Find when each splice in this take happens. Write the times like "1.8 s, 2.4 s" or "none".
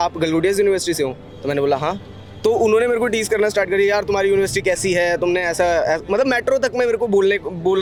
none